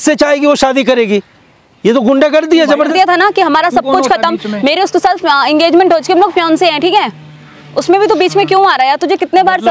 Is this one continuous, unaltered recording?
no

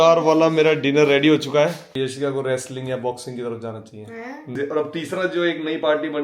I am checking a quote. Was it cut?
yes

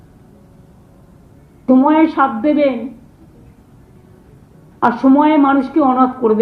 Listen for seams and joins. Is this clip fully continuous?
yes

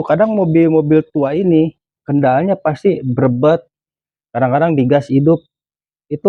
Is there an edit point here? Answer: no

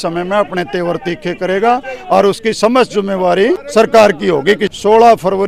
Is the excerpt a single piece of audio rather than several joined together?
no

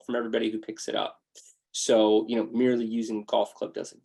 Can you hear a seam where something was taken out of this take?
no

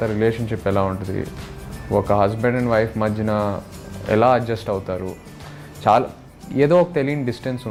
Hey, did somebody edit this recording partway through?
no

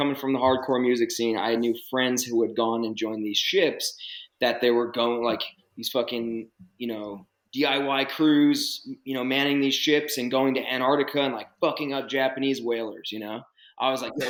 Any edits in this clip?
no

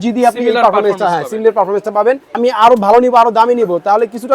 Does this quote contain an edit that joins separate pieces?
yes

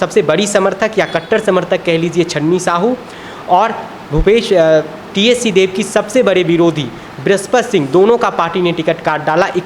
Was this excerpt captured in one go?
yes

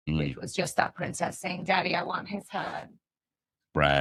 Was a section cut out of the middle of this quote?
no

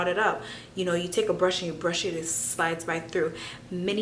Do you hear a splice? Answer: no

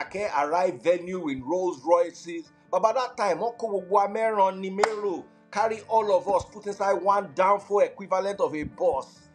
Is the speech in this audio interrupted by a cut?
no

